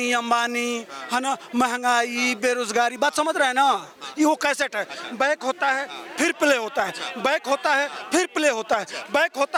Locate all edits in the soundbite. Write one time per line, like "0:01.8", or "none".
none